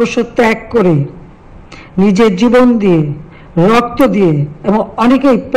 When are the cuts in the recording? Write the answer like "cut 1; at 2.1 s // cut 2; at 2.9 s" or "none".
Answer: none